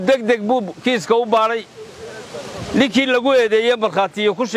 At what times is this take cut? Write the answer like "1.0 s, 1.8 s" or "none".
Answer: none